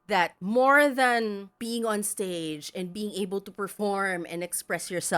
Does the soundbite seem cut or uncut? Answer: cut